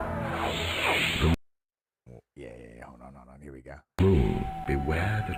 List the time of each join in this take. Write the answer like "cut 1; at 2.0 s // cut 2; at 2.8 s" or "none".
none

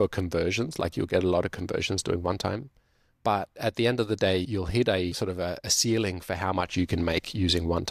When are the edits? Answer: none

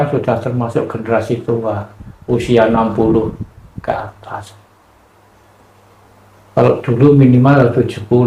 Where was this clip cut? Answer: none

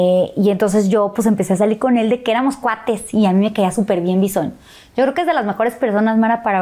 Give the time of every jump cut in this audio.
none

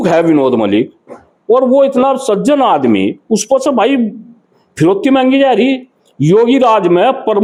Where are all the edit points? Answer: none

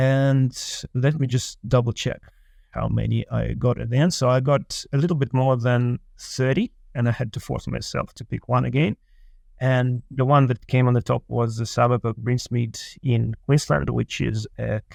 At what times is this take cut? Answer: none

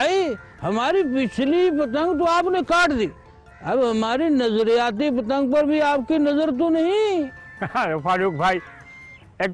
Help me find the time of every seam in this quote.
none

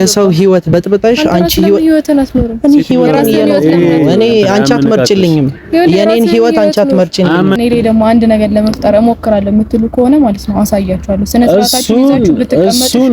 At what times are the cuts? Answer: cut 1; at 7.6 s

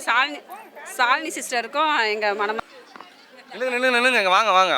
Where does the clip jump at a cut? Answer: cut 1; at 2.6 s

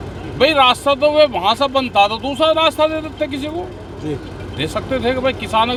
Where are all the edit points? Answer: none

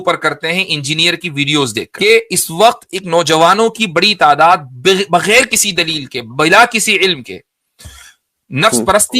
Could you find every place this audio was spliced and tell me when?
cut 1; at 1.9 s

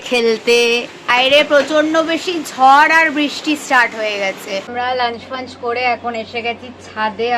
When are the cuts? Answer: cut 1; at 1.1 s // cut 2; at 4.7 s

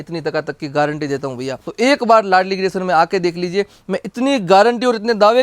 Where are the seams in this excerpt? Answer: cut 1; at 1.6 s

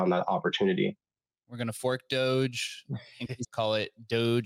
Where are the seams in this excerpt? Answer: cut 1; at 3.5 s

